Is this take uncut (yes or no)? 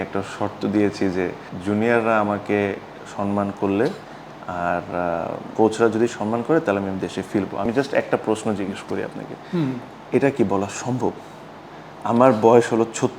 no